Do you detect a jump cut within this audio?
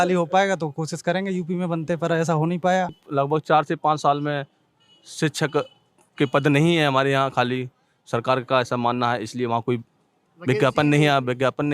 yes; 1 cut; at 3.0 s

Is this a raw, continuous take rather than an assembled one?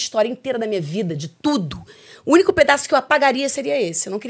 yes; 0 cuts

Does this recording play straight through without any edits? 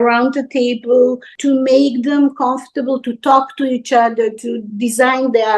yes; 0 cuts

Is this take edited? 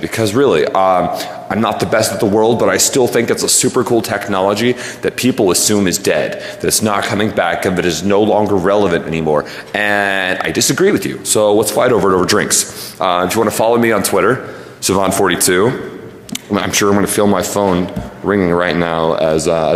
no; 0 cuts

